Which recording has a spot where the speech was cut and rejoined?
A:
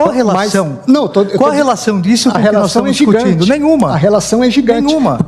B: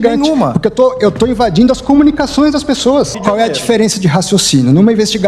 B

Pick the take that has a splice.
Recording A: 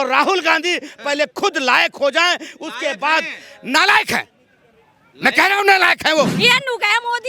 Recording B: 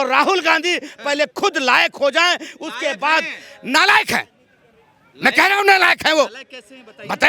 A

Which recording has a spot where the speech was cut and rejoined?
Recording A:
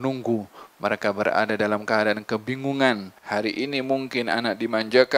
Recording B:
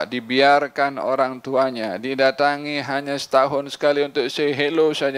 A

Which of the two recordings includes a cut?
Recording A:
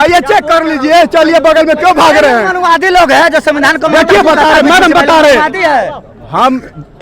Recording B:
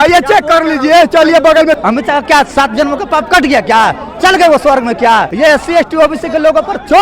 B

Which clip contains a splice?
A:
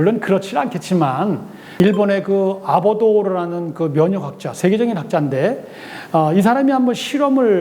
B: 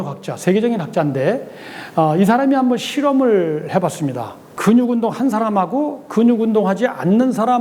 A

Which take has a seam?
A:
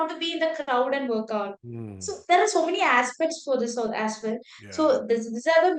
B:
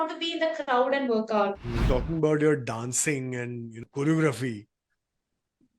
B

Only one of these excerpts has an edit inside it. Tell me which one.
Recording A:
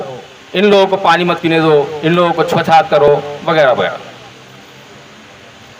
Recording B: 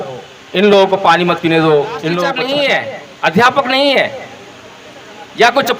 B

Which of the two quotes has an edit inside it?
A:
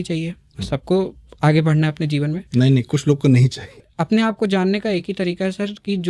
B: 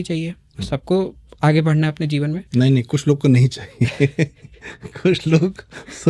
A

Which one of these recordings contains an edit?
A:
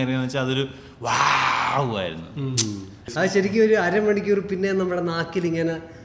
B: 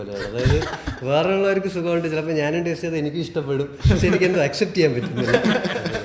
A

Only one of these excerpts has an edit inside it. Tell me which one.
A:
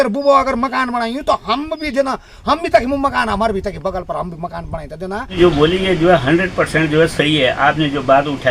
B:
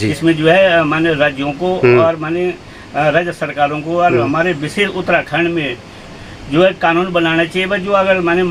A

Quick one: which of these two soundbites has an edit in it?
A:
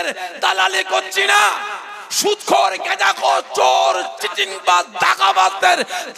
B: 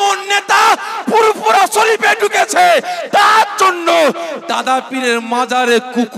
A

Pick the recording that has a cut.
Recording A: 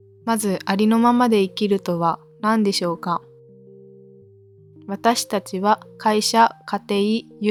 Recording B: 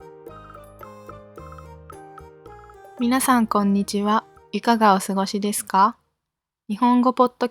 B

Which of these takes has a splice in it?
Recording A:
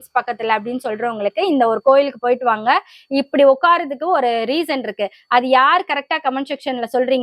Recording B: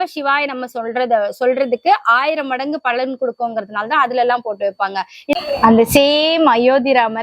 B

